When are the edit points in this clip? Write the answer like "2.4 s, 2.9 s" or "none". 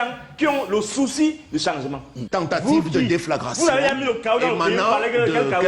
2.3 s

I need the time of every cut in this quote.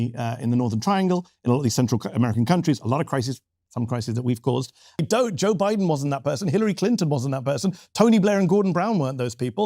5.0 s

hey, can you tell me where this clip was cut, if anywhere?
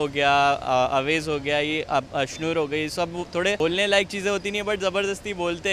3.6 s

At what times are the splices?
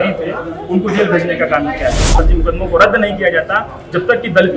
2.1 s

